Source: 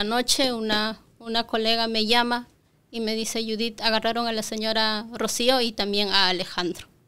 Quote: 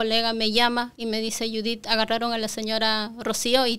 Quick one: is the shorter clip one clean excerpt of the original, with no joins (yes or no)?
no